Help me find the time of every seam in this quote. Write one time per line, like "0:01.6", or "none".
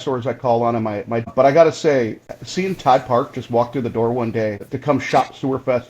0:01.3
0:04.7